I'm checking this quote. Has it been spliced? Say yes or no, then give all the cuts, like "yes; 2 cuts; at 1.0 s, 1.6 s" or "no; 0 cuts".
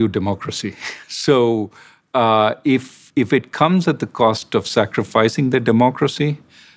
no; 0 cuts